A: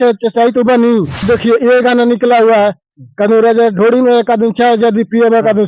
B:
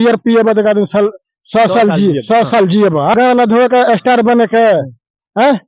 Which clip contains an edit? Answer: A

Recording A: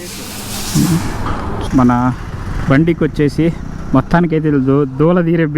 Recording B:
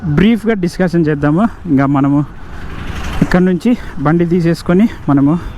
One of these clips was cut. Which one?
A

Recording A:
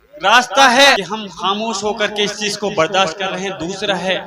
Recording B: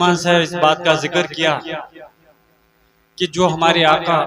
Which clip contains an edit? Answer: A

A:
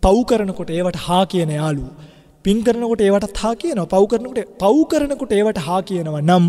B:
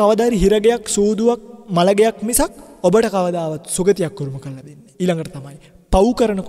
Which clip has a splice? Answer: B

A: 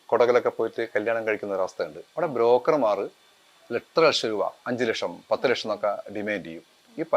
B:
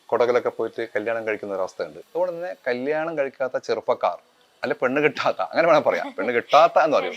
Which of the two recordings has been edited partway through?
B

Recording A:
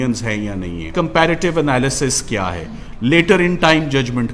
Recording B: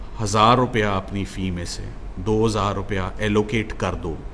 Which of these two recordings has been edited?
A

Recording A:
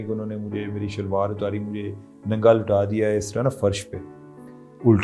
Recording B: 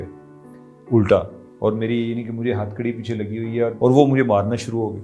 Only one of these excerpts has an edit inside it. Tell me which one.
B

